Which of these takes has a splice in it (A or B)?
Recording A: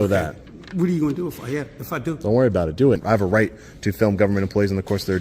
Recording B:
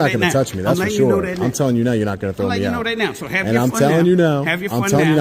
A